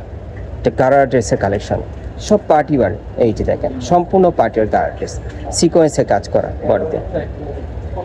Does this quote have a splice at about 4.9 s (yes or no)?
no